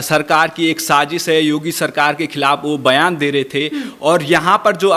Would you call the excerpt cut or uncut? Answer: uncut